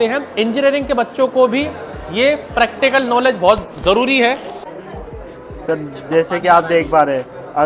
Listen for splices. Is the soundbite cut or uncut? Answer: cut